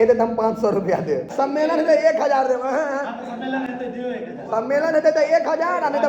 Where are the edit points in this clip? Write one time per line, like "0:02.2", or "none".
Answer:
0:01.3